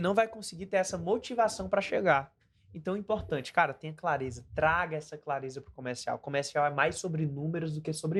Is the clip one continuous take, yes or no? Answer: yes